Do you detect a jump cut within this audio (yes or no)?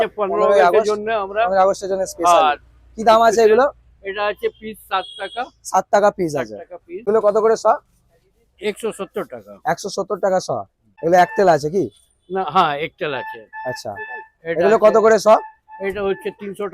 yes